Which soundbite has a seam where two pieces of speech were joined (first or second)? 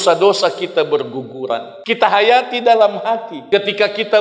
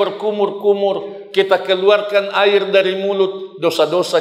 first